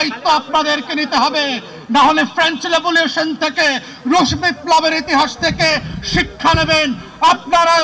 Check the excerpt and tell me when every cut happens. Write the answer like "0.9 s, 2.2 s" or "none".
none